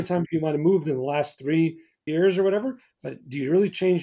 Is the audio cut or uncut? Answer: cut